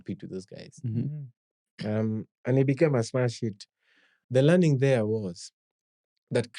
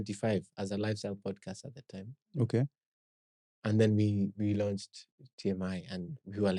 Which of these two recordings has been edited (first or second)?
first